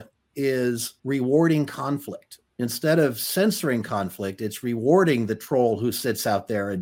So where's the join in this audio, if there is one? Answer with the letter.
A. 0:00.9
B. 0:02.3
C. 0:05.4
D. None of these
D